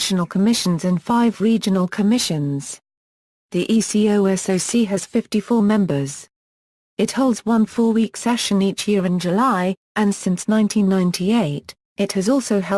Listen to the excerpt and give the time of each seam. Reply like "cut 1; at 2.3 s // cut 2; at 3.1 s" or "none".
cut 1; at 6.9 s